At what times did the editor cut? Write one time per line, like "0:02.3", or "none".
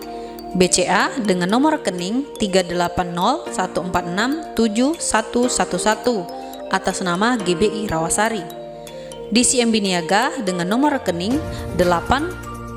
none